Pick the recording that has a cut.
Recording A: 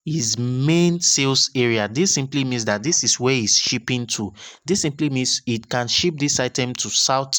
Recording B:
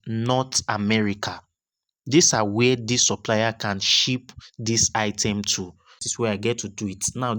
B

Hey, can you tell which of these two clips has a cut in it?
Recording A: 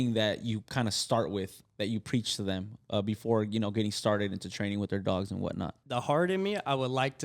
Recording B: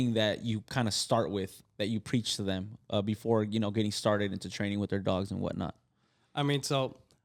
A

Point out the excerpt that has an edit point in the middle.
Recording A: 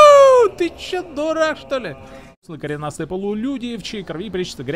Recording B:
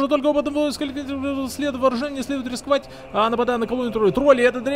A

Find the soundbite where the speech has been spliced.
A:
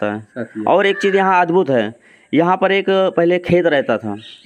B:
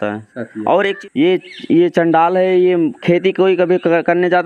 B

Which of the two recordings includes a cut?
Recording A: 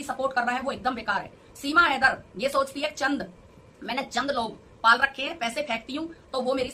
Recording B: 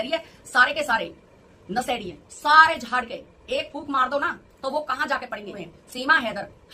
B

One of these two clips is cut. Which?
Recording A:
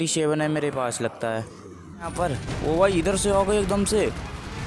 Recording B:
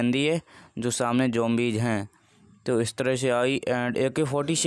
A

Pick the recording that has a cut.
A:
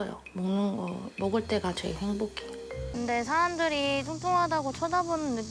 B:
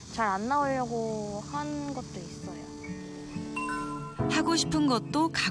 A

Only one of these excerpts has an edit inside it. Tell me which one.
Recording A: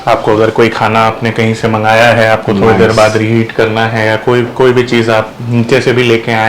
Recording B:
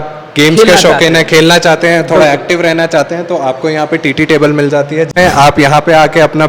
B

